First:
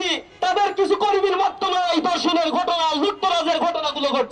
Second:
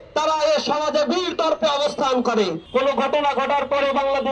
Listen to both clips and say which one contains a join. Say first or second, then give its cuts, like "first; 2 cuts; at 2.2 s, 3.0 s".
second; 1 cut; at 2.6 s